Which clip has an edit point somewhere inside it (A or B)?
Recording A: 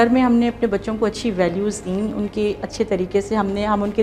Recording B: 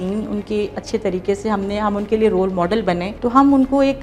B